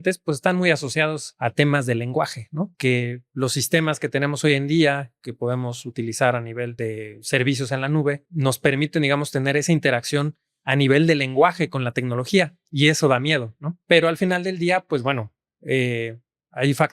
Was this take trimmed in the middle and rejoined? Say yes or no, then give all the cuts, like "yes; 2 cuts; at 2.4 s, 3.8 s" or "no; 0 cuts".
yes; 5 cuts; at 1.3 s, 2.7 s, 6.7 s, 8.3 s, 13.7 s